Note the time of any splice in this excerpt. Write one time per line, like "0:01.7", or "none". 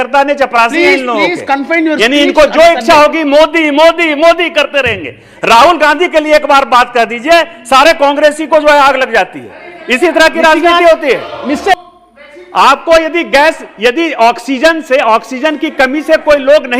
0:11.8